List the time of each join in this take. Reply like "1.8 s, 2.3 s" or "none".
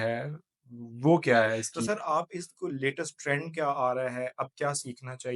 1.9 s